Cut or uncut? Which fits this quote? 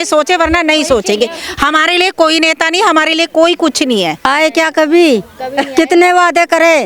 cut